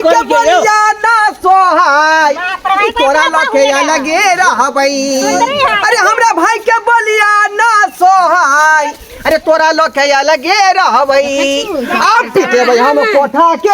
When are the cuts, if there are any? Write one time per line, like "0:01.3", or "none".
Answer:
none